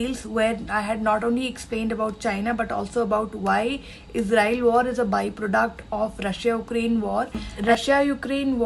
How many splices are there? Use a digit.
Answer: 1